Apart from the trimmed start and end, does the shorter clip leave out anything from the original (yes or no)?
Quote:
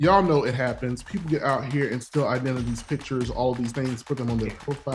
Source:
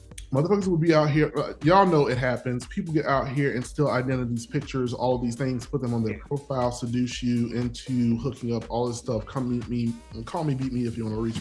no